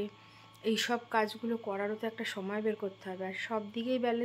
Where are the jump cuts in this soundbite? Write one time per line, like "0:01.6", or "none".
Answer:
none